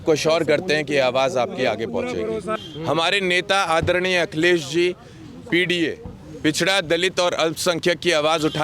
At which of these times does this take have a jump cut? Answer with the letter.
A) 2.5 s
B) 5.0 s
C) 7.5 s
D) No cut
A